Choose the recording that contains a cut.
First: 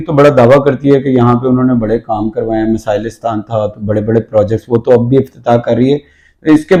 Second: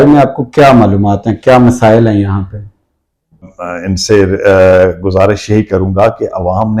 second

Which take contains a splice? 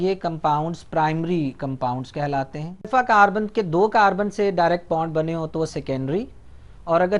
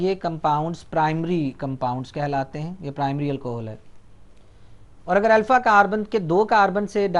first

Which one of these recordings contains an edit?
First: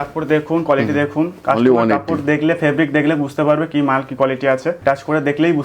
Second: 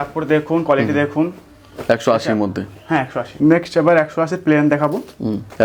first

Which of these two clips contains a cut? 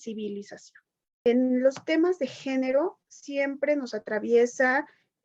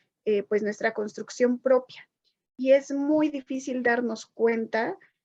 first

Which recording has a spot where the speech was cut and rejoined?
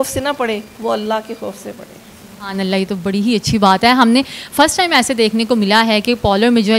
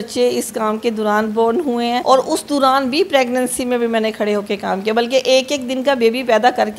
second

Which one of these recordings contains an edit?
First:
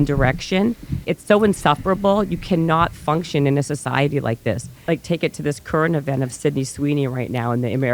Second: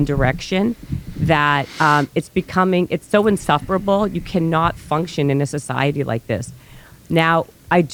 first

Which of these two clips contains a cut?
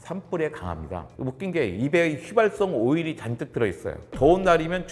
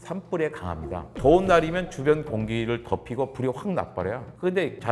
second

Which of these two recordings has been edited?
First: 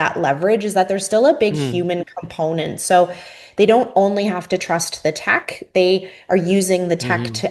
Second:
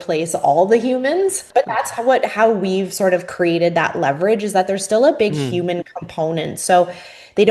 second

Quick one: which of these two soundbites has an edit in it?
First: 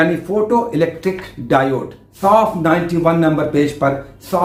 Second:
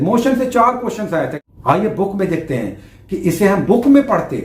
second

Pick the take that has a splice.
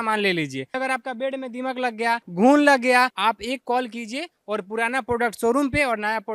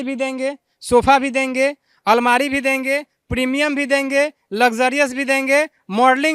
first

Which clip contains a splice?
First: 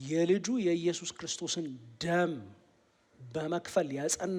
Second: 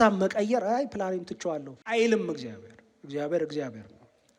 second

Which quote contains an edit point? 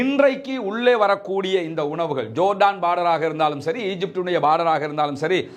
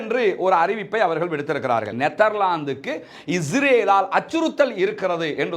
second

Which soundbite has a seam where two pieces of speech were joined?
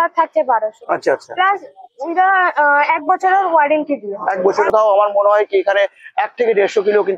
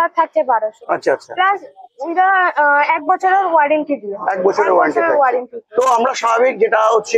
first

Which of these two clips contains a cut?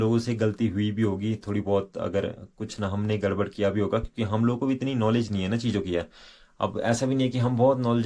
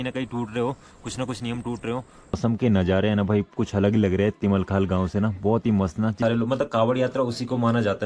second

